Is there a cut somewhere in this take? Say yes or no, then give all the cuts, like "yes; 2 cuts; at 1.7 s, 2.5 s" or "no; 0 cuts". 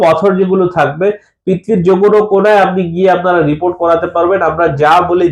no; 0 cuts